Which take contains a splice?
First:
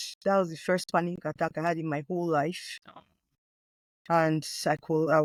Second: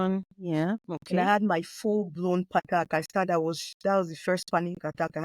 second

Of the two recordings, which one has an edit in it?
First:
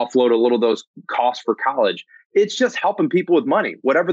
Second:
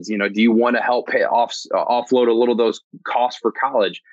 second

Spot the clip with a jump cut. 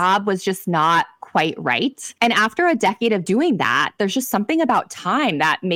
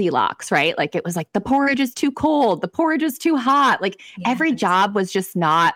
first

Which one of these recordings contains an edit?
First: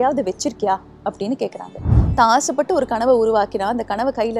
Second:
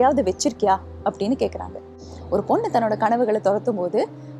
first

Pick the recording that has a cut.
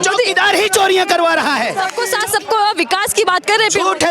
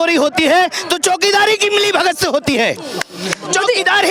first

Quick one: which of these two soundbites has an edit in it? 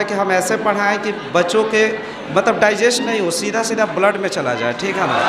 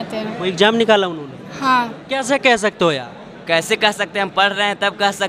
second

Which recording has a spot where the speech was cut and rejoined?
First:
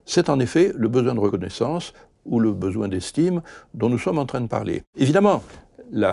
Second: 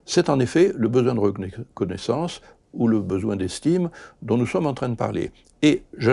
first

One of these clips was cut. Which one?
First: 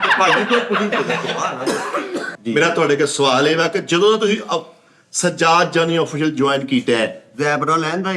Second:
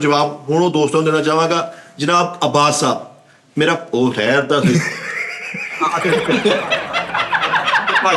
first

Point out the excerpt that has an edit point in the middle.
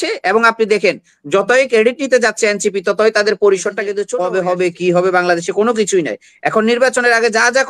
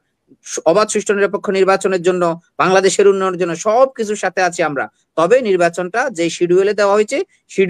first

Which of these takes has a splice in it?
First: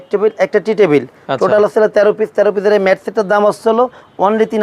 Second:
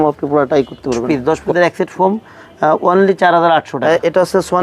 second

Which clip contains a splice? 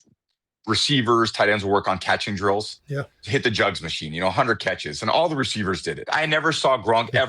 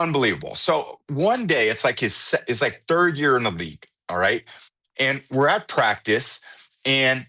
first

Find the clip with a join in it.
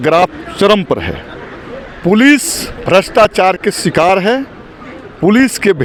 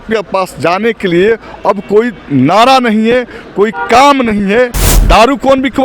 second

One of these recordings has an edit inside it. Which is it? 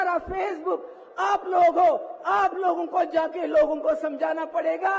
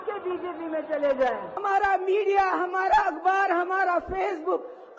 second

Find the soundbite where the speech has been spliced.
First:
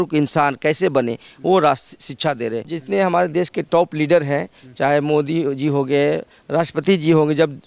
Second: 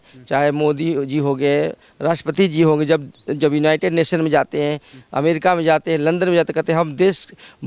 first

